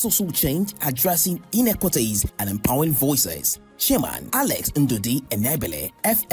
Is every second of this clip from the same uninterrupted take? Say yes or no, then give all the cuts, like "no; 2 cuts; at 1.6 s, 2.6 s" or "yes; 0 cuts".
yes; 0 cuts